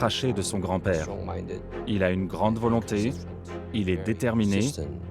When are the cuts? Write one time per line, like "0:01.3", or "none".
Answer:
0:01.7